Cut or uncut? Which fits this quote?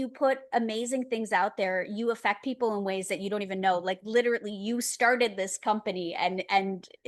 uncut